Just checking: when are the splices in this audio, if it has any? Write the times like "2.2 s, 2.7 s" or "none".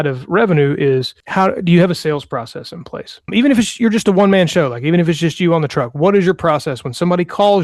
1.2 s, 3.3 s